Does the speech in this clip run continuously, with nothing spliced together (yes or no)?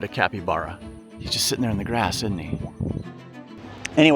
no